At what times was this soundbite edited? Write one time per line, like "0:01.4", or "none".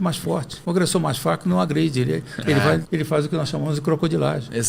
none